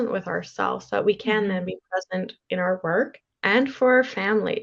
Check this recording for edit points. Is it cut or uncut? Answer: cut